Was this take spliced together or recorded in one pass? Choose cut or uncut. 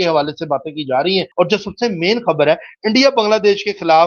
cut